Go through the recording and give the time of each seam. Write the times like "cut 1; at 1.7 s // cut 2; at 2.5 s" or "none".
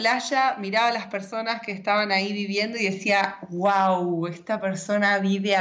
none